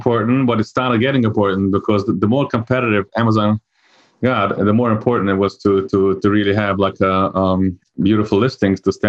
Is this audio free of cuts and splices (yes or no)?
yes